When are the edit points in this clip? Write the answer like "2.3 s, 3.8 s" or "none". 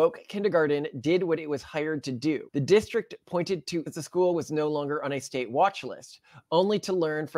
2.5 s, 3.9 s